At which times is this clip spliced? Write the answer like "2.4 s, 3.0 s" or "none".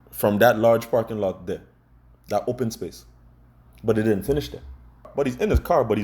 5.1 s